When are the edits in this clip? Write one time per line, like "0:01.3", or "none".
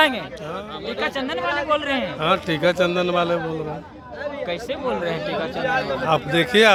none